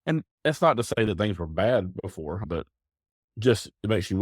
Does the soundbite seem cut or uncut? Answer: cut